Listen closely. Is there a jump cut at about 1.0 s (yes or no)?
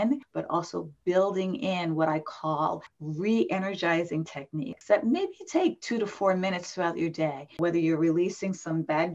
no